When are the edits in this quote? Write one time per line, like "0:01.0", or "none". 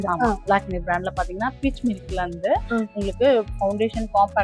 none